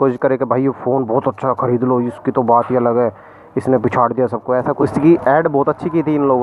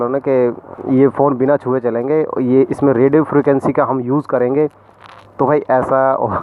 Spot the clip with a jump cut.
first; 1 cut; at 4.7 s

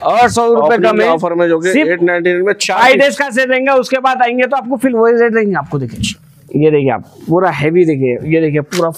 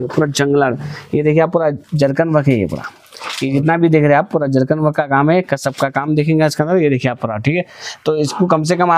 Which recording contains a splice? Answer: first; 1 cut; at 6.0 s

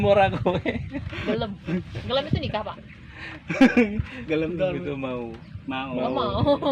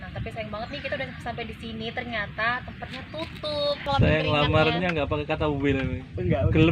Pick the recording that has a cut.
second; 1 cut; at 3.9 s

